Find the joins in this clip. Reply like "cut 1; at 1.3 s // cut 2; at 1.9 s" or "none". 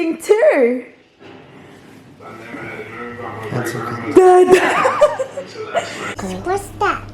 cut 1; at 6.2 s